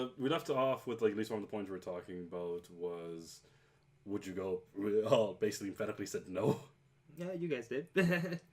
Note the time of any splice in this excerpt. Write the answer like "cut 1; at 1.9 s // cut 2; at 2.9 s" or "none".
cut 1; at 2.9 s